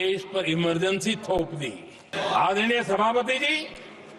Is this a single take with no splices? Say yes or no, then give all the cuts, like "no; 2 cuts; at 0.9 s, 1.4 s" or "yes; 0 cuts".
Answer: no; 1 cut; at 2.1 s